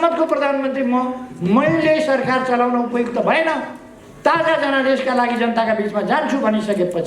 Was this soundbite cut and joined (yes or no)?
no